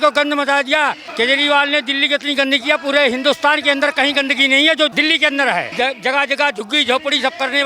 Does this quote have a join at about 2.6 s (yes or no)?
no